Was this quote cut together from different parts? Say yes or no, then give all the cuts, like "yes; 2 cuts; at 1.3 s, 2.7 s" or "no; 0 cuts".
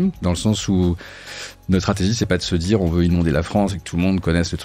no; 0 cuts